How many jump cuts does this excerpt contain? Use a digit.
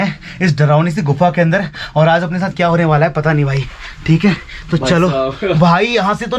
0